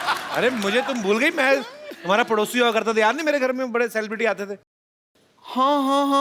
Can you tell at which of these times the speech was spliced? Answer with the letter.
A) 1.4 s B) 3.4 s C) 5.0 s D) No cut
C